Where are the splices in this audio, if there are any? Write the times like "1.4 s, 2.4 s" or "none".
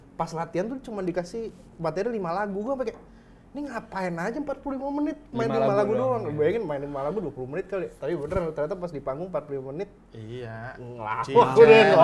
none